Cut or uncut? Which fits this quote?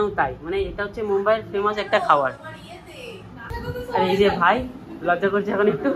cut